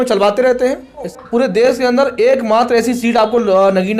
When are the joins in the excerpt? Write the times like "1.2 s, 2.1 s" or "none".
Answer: 1.2 s